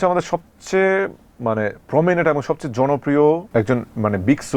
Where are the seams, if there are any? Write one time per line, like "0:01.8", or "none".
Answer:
0:03.4

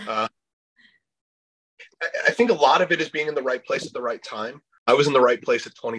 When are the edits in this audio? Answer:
0:04.7

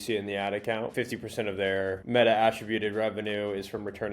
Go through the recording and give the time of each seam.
0:00.9

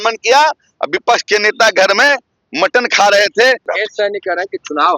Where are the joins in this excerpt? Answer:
0:03.6

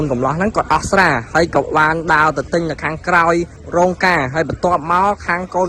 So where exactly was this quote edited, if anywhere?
0:03.6

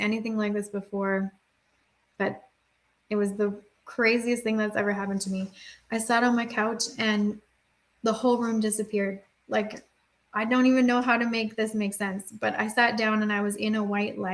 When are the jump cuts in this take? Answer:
none

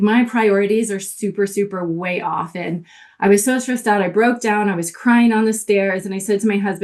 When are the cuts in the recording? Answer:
none

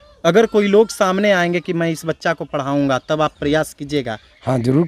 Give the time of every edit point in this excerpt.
none

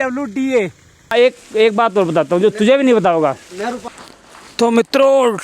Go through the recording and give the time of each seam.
0:01.1
0:03.8

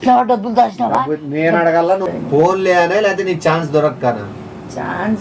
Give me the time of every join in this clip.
0:00.9
0:02.0

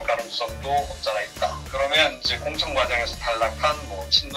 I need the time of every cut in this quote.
none

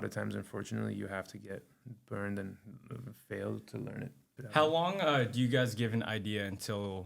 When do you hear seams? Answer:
0:04.5

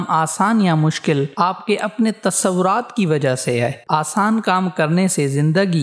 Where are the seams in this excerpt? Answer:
0:03.8

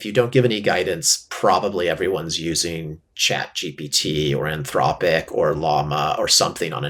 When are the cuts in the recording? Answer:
none

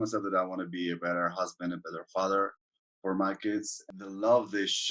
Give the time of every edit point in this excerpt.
0:03.8

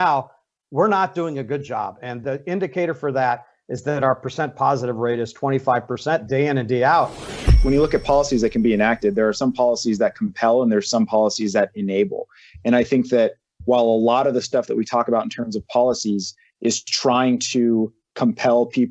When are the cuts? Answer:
0:07.3

